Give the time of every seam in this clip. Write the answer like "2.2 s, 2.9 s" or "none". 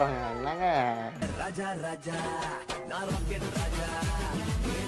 1.1 s